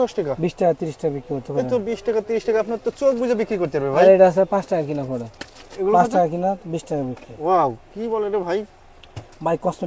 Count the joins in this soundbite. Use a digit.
0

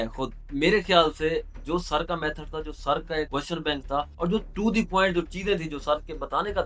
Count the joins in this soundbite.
2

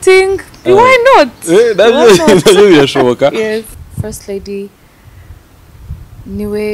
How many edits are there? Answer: 1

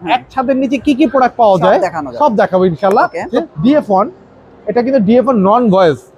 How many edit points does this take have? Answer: 1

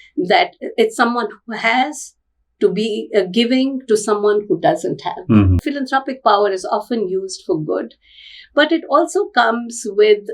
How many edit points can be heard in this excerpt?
1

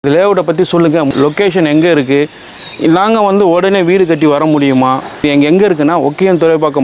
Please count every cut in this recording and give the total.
2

